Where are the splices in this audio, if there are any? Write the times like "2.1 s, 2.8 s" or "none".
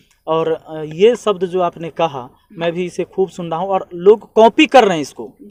none